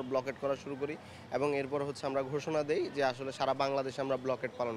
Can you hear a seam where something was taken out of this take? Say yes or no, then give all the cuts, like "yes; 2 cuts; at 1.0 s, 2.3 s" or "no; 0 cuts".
no; 0 cuts